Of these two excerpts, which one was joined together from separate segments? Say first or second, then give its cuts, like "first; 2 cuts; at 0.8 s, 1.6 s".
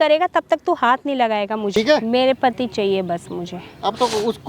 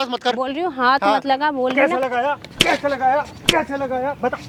first; 1 cut; at 1.7 s